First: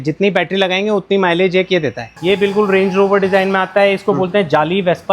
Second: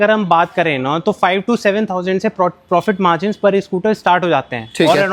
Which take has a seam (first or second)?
first